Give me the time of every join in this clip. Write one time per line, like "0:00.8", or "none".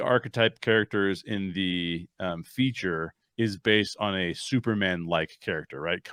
none